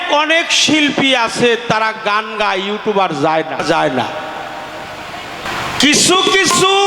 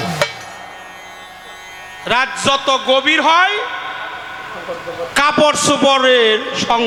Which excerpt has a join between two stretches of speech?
first; 2 cuts; at 3.6 s, 5.5 s

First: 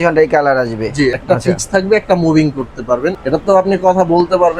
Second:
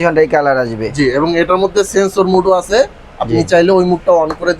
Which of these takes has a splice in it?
first; 2 cuts; at 1.1 s, 3.2 s

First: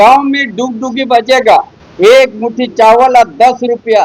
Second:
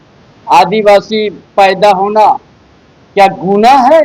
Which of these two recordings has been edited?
first; 1 cut; at 1.8 s

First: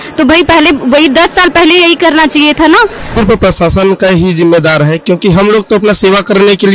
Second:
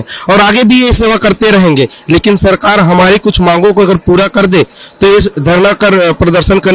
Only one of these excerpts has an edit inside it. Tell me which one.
first; 1 cut; at 3.1 s

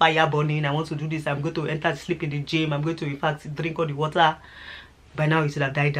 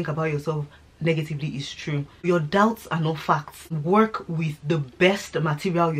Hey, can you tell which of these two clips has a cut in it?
second; 2 cuts; at 2.3 s, 3.7 s

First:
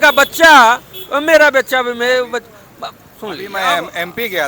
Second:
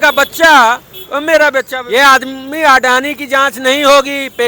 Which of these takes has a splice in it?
second; 1 cut; at 1.8 s

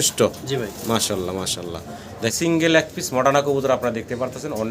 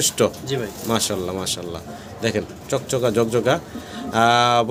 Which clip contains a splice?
first; 1 cut; at 2.3 s

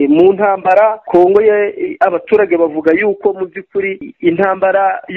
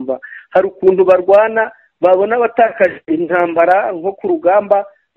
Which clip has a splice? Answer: first; 2 cuts; at 1.0 s, 4.1 s

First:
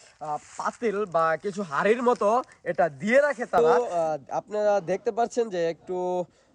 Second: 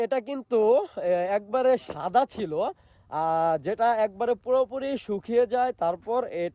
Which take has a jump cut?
first; 1 cut; at 3.6 s

